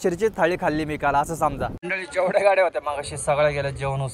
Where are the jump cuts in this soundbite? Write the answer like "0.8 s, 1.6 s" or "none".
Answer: 1.8 s

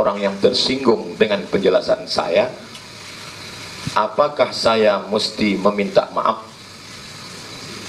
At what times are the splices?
6.6 s

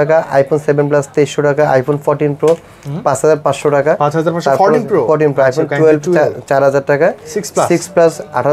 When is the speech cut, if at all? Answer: none

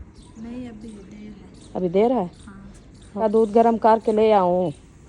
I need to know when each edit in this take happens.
3.2 s

